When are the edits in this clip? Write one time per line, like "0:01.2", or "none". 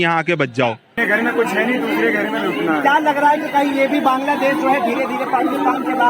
0:01.0